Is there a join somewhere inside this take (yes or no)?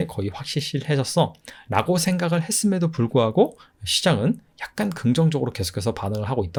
no